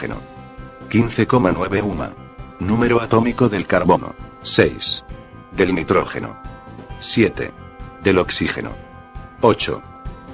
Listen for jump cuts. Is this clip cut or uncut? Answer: uncut